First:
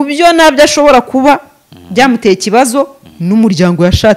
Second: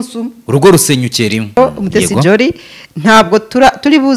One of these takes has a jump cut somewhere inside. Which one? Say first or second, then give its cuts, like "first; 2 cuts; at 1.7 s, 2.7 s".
second; 1 cut; at 1.6 s